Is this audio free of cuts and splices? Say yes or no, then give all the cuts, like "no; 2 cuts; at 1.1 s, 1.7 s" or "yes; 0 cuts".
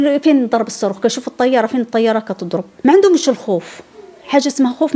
no; 1 cut; at 2.7 s